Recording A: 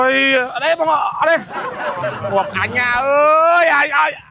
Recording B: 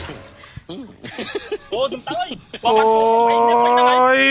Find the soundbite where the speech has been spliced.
B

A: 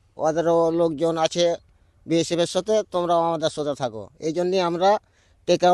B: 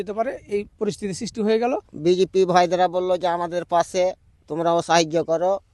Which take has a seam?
B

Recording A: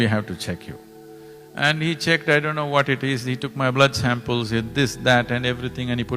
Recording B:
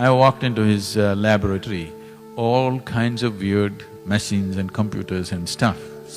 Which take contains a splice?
B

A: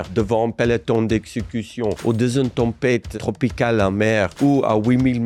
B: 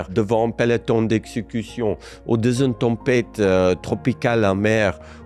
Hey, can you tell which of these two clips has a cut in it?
A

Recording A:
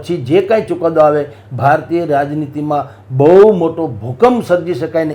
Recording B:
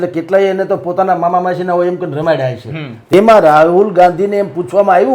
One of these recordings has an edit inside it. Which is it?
B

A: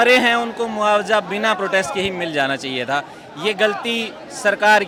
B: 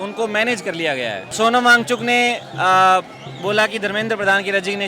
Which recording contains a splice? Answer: B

